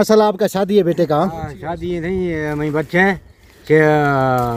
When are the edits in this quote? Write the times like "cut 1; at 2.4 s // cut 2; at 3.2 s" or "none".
none